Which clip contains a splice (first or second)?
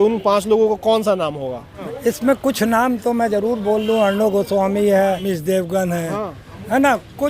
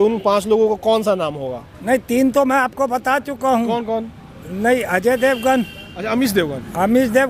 first